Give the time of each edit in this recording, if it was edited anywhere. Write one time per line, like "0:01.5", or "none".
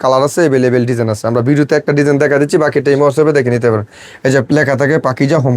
none